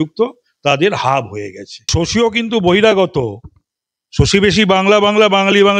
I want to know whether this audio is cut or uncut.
cut